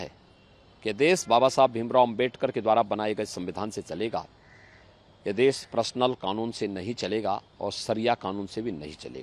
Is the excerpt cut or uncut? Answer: uncut